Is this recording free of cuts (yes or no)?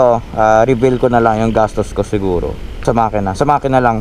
no